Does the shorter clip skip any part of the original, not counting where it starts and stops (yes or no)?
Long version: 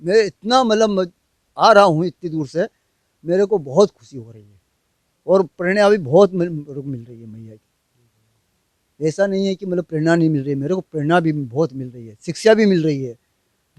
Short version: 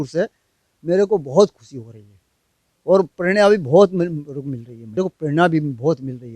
yes